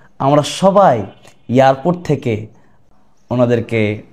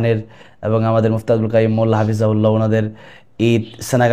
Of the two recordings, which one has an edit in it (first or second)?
first